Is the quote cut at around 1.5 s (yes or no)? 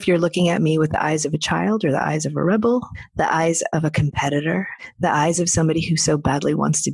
no